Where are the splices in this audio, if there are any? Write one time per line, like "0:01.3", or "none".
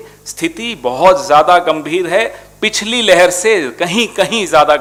none